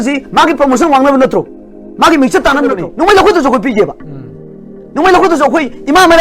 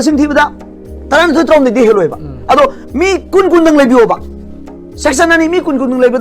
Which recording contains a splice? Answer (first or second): first